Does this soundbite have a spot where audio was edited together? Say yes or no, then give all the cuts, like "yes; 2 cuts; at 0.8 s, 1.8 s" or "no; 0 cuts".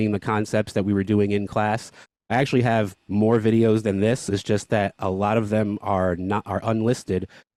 no; 0 cuts